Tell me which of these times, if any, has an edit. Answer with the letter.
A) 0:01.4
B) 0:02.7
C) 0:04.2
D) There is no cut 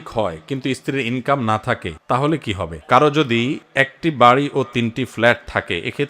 B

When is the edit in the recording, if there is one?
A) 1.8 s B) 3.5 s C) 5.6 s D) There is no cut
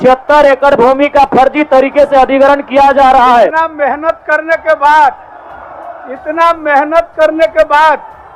B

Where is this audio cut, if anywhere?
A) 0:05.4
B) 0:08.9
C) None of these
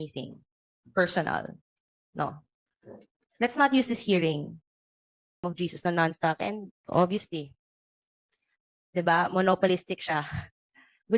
A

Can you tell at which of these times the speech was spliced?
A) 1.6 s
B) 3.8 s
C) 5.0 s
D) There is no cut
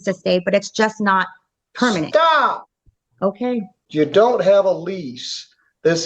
B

